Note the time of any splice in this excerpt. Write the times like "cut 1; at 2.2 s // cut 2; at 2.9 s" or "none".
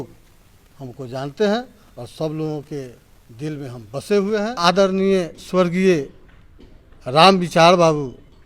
cut 1; at 4.6 s